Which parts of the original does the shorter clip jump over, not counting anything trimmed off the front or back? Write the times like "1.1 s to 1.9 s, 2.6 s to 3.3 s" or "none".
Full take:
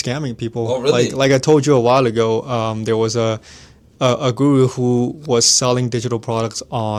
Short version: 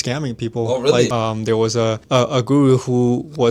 1.1 s to 2.5 s, 3.4 s to 3.9 s